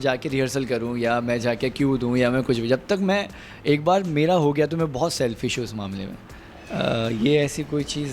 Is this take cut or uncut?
uncut